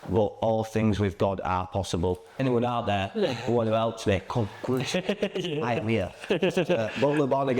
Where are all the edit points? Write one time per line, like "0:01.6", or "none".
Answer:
0:02.4